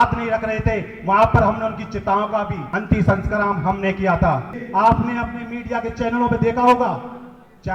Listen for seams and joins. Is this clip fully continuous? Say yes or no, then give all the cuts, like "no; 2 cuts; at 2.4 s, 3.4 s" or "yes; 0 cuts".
no; 2 cuts; at 2.6 s, 4.6 s